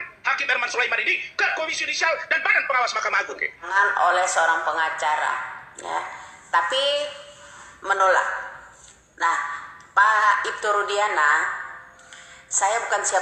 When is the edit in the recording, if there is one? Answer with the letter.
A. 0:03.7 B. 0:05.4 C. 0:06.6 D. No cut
A